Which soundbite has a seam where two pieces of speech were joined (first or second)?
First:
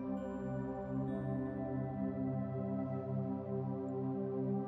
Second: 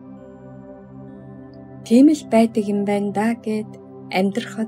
second